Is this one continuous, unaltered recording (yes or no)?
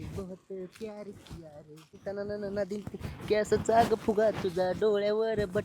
no